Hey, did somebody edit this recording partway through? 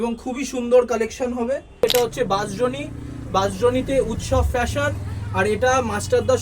yes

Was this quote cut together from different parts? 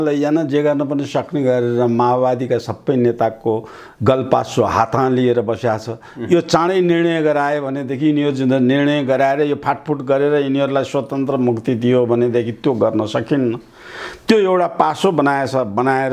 no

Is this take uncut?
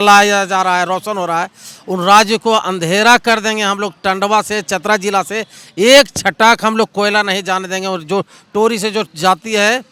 yes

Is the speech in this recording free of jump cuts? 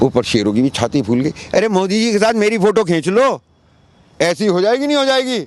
yes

